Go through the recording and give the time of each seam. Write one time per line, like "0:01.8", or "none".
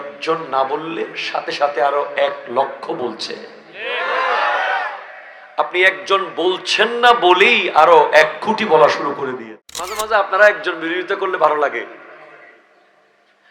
0:09.3